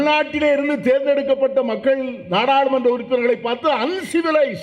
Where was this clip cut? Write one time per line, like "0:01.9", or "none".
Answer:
none